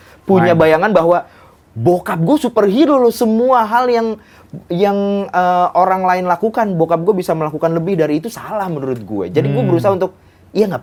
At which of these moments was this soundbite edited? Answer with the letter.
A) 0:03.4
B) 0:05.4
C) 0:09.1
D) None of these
D